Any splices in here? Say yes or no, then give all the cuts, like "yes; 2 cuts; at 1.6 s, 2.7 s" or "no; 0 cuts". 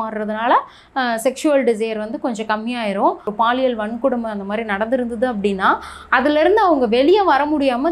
yes; 1 cut; at 3.3 s